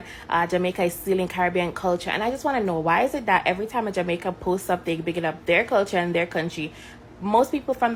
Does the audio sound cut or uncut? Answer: uncut